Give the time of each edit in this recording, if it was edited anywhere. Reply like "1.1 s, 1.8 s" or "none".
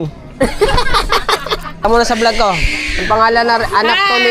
1.8 s